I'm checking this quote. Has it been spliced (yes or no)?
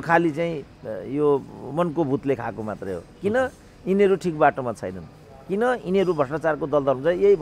no